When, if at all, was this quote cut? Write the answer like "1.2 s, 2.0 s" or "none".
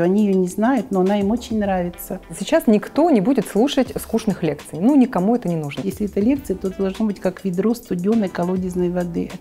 2.4 s, 5.9 s